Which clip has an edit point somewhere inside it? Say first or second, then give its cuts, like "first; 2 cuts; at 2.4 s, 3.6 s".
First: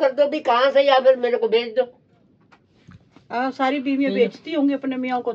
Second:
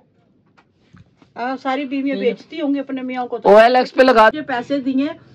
second; 1 cut; at 4.3 s